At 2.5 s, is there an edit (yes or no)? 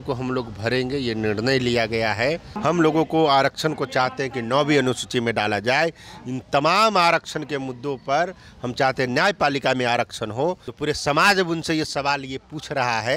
yes